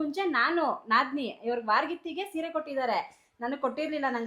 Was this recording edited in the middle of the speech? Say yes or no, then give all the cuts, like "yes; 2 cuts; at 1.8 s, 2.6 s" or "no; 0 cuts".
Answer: no; 0 cuts